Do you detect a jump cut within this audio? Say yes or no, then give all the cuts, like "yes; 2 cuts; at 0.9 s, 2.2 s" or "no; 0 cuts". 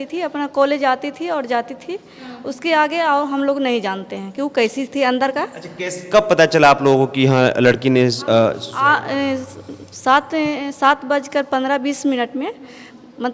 no; 0 cuts